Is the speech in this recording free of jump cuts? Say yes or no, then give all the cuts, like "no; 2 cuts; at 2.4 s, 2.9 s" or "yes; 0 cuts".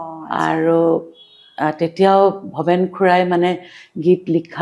yes; 0 cuts